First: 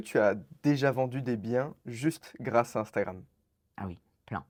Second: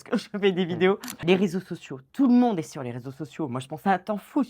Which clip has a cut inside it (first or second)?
second